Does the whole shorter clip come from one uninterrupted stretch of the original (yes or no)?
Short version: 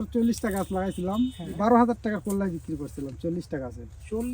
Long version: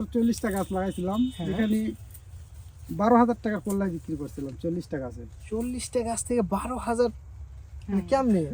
no